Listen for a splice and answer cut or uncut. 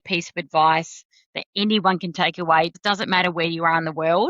cut